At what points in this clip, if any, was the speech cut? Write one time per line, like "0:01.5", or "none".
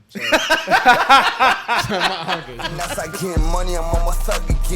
0:02.6